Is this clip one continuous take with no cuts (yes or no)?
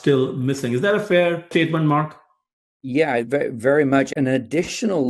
no